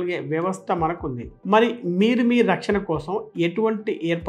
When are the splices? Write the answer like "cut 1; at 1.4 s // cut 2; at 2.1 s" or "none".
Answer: none